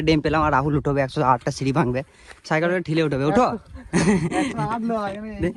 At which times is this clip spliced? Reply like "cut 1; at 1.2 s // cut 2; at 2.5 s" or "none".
none